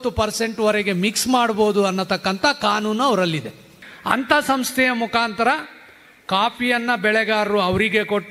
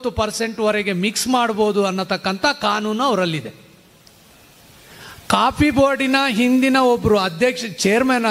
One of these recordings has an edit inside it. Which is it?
first; 1 cut; at 3.9 s

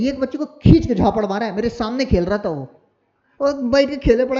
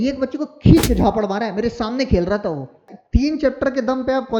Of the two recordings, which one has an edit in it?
second; 1 cut; at 2.9 s

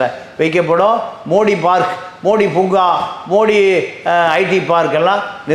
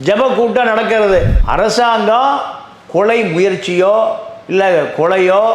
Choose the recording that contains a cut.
second; 1 cut; at 1.4 s

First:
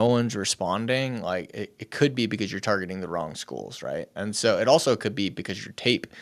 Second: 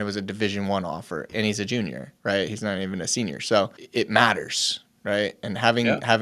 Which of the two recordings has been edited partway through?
second; 2 cuts; at 1.3 s, 3.8 s

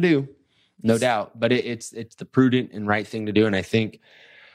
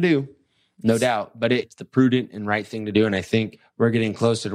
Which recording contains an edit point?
second; 2 cuts; at 1.8 s, 3.6 s

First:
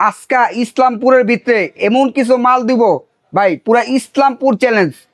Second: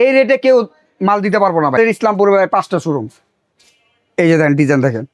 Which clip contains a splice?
second; 1 cut; at 1.8 s

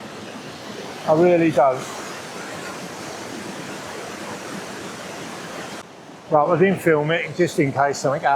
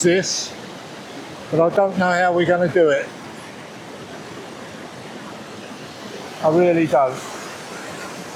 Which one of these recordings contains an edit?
first; 1 cut; at 5.8 s

